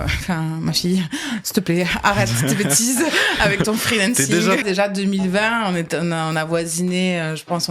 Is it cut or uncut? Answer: cut